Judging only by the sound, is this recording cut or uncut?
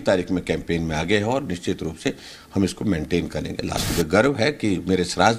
cut